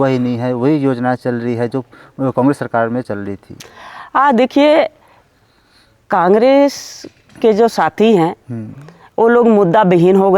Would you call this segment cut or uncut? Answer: uncut